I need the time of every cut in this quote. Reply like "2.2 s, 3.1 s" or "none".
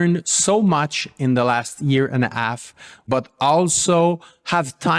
3.0 s